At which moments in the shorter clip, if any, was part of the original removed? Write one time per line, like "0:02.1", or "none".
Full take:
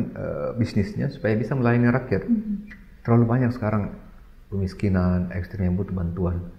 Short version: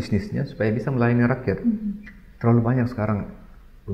none